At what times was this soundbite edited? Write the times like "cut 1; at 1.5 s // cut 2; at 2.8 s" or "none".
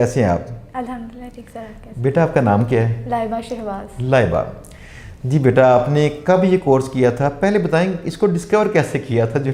none